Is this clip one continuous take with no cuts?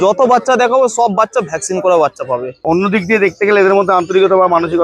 no; 1 cut; at 2.5 s

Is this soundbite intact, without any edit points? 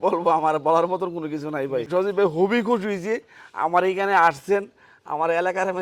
no; 1 cut; at 1.9 s

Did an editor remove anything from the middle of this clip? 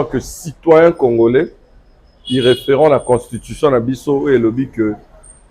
no; 0 cuts

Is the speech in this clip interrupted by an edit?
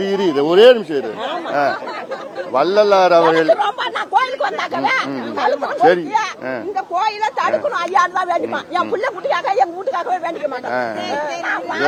no; 0 cuts

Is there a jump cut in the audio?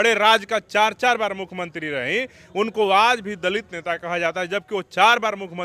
no; 0 cuts

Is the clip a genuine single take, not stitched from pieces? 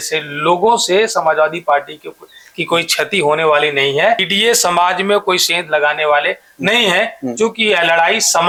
yes; 0 cuts

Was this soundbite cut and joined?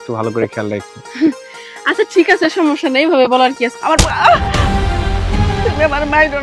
yes; 1 cut; at 3.7 s

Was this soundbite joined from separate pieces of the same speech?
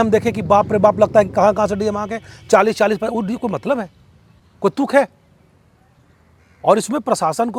no; 0 cuts

